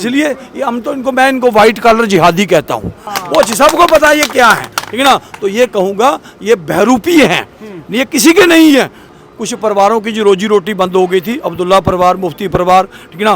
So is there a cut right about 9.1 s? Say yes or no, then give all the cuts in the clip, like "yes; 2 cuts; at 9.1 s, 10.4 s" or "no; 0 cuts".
yes; 2 cuts; at 3.1 s, 9.1 s